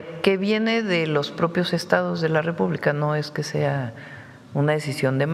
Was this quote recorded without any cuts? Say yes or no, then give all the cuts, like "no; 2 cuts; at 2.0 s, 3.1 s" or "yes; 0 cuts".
yes; 0 cuts